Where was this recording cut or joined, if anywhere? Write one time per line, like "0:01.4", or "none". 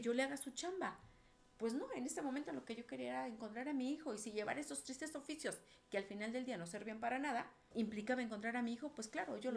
0:07.6